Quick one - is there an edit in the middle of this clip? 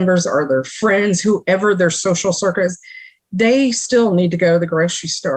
no; 0 cuts

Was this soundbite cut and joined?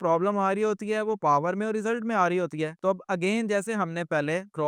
no; 0 cuts

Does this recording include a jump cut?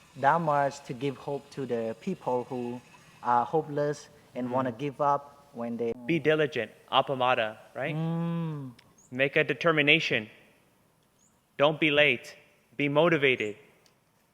yes; 1 cut; at 5.9 s

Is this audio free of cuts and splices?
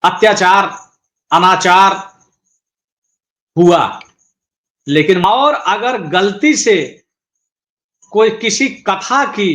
no; 1 cut; at 5.2 s

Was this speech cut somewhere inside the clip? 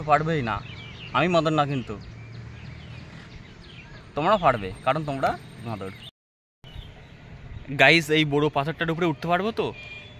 yes; 1 cut; at 6.1 s

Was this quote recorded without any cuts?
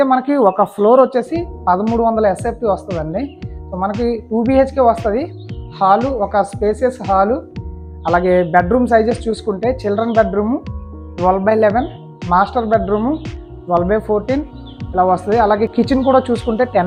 yes; 0 cuts

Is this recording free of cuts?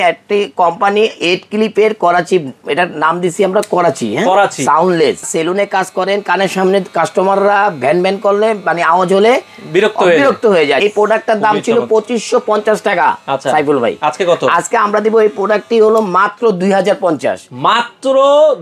no; 2 cuts; at 5.3 s, 10.8 s

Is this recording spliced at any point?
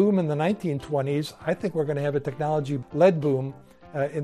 yes; 1 cut; at 2.8 s

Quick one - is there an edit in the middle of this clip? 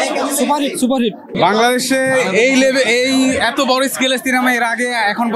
yes; 1 cut; at 1.2 s

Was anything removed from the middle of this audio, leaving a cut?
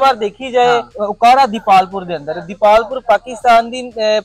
yes; 1 cut; at 1.0 s

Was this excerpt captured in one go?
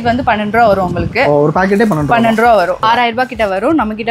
no; 1 cut; at 2.8 s

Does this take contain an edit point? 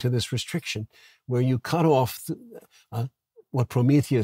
no; 0 cuts

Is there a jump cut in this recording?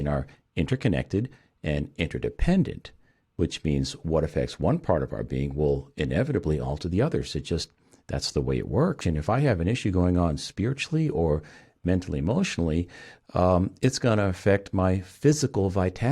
yes; 1 cut; at 9.0 s

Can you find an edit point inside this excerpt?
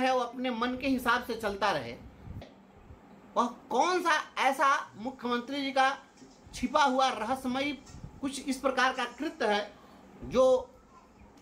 yes; 1 cut; at 2.4 s

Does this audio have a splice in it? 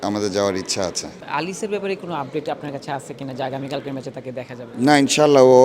yes; 1 cut; at 1.1 s

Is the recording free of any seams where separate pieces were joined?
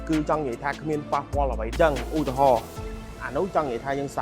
no; 1 cut; at 1.7 s

